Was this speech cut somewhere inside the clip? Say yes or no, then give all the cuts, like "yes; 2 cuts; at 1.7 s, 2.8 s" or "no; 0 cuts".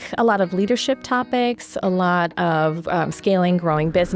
no; 0 cuts